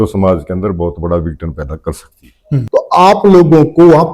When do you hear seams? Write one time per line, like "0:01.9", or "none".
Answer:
0:02.6